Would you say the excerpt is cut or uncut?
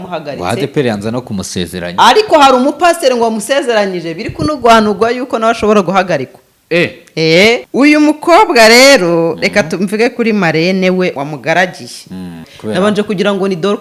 cut